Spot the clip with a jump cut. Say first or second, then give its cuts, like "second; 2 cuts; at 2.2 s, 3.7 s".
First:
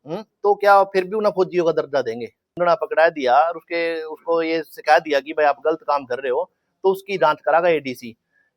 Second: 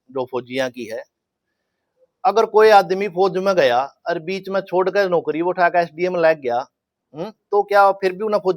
first; 1 cut; at 2.4 s